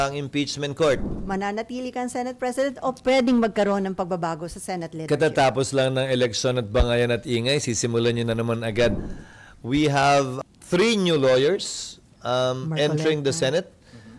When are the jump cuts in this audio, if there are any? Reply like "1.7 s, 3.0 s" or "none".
1.1 s, 9.0 s, 10.3 s

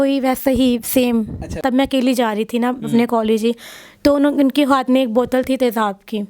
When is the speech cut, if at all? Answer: 1.6 s

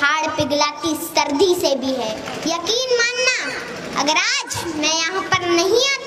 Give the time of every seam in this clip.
2.3 s

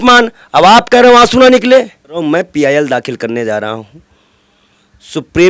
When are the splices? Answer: 2.2 s

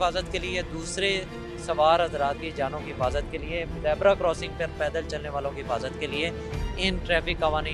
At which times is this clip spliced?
none

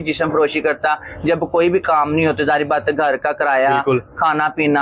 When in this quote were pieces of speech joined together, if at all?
none

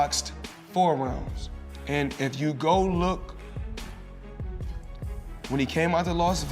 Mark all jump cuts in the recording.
3.6 s, 5.0 s

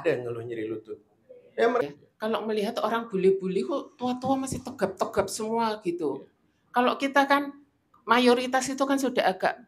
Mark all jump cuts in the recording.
1.8 s

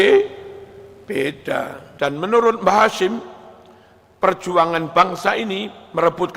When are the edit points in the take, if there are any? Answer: 1.8 s

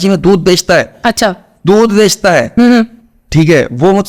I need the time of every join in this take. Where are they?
none

